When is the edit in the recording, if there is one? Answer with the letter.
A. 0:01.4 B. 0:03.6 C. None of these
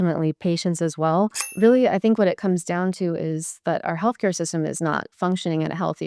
A